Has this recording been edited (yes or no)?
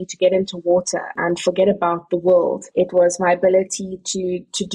yes